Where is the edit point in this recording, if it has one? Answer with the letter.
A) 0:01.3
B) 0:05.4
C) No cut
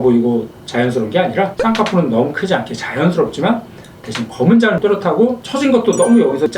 C